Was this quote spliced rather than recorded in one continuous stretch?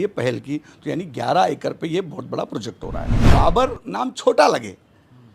yes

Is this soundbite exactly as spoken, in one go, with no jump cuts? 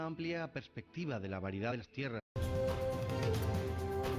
yes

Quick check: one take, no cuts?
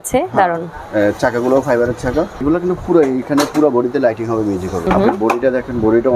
no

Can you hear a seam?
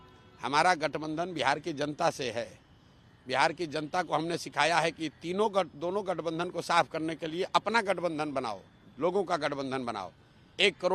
no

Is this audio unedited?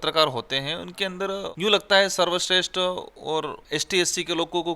no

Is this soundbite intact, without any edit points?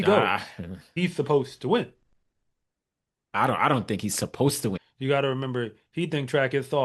no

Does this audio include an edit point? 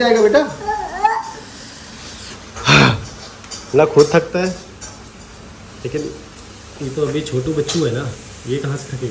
no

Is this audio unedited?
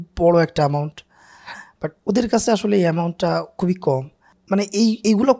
no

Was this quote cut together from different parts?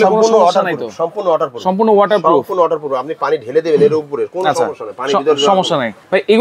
no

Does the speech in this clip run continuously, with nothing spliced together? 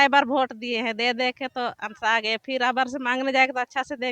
yes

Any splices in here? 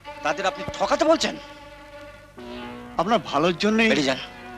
no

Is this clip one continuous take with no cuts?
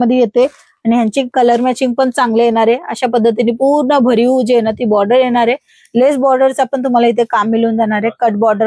yes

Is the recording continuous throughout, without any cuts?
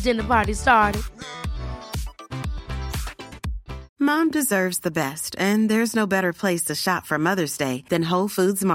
no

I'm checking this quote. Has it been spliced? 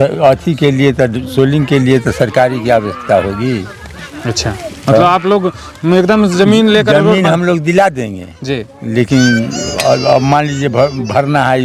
no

